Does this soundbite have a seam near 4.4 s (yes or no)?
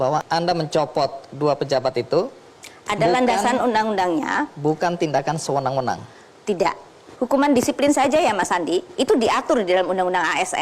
no